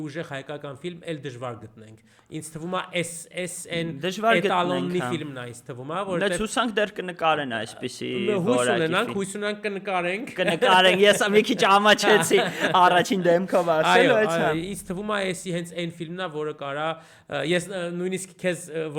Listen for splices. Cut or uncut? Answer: uncut